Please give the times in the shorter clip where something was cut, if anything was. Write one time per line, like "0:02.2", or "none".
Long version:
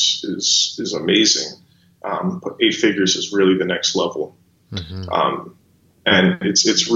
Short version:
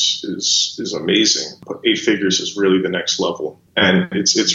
0:01.7
0:03.6